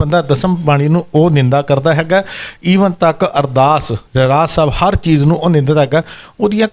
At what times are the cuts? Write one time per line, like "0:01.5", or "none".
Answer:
none